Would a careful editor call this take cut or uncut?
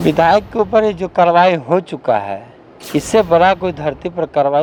uncut